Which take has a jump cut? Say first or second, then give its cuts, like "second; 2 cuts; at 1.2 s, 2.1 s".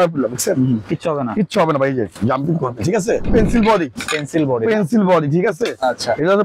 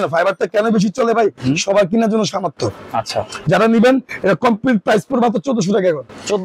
first; 1 cut; at 3.3 s